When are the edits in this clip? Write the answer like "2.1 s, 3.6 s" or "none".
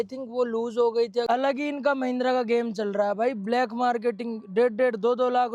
1.2 s